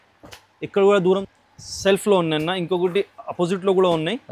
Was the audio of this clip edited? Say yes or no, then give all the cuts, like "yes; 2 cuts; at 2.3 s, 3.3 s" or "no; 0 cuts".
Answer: yes; 1 cut; at 1.2 s